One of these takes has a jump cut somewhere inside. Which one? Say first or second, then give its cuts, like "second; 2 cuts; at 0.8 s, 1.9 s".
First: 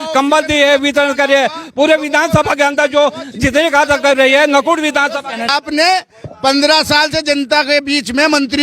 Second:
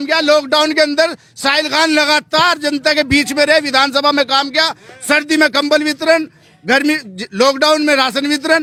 first; 1 cut; at 5.5 s